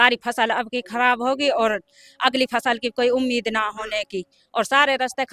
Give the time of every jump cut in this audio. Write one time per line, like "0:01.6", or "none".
none